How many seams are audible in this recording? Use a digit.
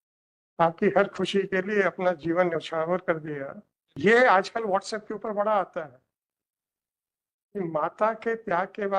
1